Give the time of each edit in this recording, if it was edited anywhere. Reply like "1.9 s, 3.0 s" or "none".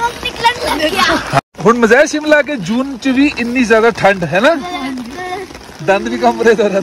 1.4 s